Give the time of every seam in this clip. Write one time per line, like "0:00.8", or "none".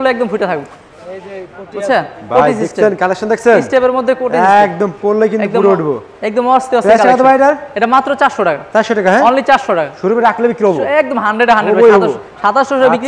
none